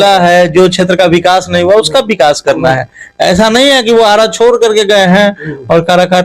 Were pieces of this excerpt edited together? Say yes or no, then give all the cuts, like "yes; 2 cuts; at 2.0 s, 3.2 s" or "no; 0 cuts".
no; 0 cuts